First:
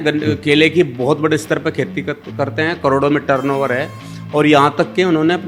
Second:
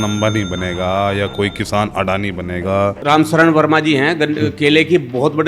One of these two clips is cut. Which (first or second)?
second